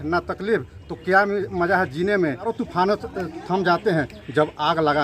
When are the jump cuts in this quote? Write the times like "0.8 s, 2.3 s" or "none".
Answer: 2.5 s